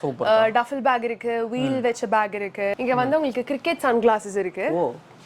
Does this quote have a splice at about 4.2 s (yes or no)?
no